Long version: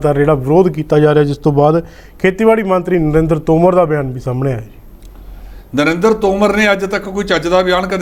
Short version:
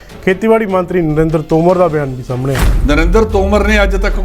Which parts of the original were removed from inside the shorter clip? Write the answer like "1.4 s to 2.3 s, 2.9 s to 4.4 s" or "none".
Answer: 4.7 s to 5.6 s

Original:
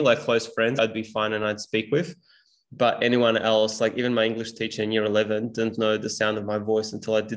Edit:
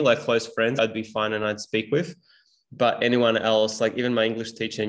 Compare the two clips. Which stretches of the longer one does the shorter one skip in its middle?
none

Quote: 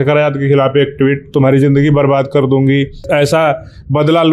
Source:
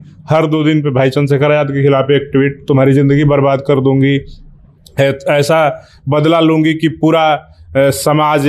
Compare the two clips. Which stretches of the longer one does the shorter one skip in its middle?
4.4 s to 5.2 s

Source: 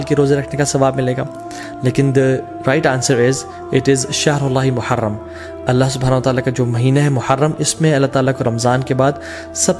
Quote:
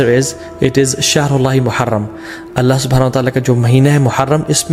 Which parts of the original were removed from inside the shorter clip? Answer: none

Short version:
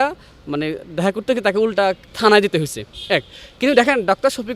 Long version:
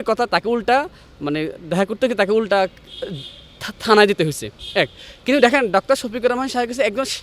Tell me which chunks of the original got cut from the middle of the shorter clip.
2.8 s to 3.7 s

